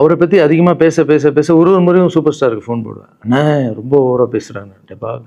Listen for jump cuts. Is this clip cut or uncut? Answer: uncut